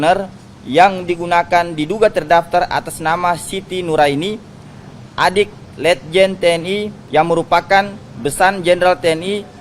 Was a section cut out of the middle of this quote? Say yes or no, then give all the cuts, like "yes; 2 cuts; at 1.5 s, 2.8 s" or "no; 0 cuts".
yes; 1 cut; at 7.0 s